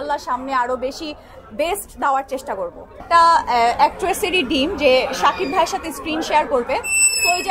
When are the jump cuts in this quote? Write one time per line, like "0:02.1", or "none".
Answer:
0:02.9

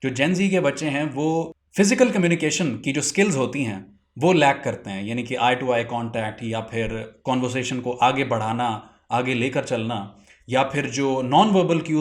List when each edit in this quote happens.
0:01.6

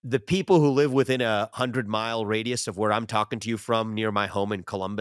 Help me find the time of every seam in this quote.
none

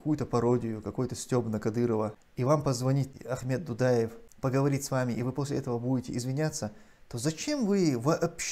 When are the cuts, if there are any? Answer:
0:02.2
0:03.1
0:04.2

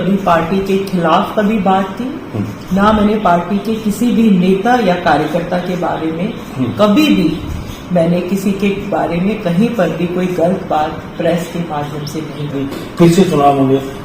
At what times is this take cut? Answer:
0:12.5

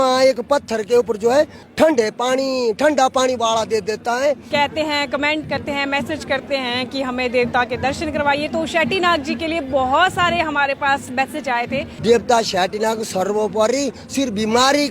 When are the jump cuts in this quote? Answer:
0:01.6
0:04.4
0:11.9

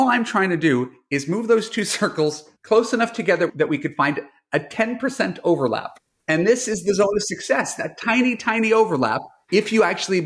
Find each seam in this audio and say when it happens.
none

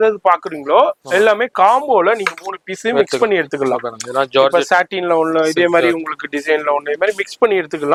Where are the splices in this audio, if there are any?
none

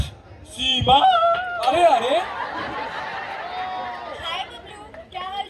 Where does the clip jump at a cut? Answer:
none

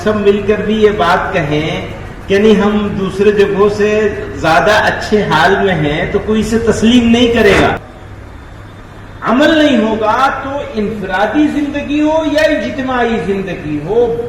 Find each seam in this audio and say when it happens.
0:07.8

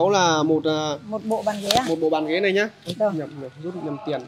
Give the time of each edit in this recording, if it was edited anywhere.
none

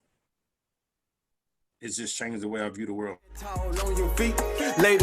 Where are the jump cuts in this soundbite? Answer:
0:03.3

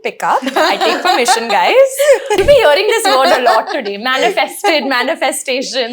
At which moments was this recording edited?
0:02.4

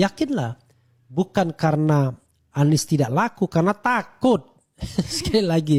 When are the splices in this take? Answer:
none

